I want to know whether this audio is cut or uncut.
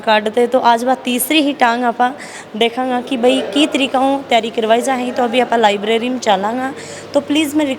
uncut